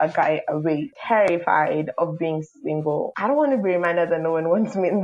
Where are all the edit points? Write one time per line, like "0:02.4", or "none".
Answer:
0:00.9
0:03.1